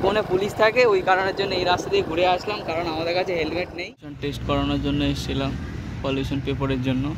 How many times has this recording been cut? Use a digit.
1